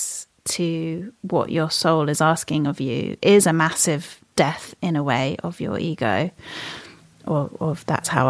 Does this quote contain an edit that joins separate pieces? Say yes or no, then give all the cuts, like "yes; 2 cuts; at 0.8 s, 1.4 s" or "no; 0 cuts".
no; 0 cuts